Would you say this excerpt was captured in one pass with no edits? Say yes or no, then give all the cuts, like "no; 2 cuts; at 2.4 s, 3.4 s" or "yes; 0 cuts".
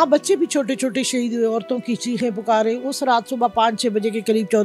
yes; 0 cuts